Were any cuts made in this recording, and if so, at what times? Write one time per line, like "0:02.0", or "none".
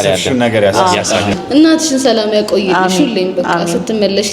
0:01.4